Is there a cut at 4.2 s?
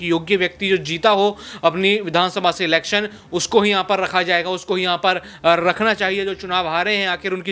no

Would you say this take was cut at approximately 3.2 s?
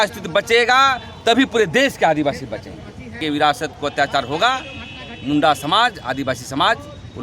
yes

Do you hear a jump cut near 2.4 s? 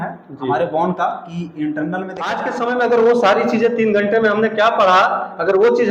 yes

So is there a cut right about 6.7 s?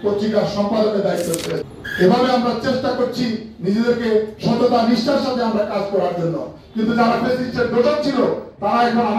no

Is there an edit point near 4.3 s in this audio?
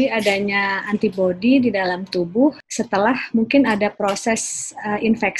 no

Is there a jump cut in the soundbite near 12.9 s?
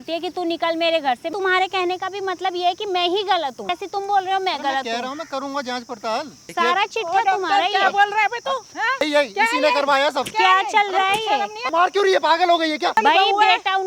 yes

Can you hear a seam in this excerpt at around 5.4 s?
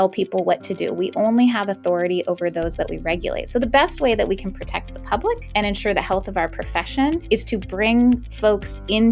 yes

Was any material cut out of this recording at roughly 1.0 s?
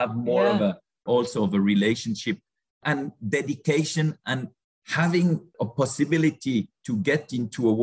yes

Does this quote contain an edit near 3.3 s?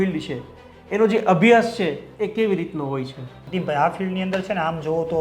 yes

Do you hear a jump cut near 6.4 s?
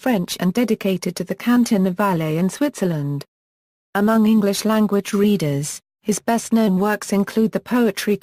yes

